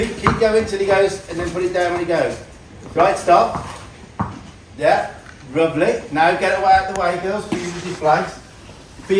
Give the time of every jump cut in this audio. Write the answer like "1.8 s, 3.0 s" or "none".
none